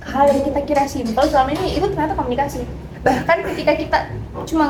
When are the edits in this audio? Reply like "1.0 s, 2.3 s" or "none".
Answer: none